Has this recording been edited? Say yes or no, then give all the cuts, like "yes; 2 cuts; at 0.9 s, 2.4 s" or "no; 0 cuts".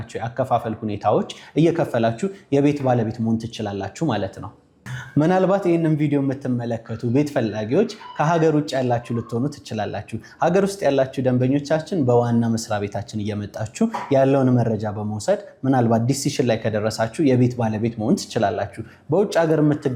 no; 0 cuts